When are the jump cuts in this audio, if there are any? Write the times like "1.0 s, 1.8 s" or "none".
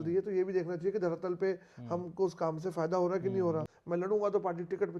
3.7 s